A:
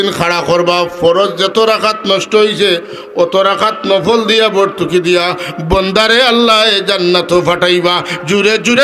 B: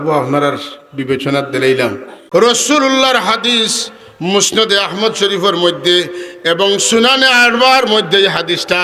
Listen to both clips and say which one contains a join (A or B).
B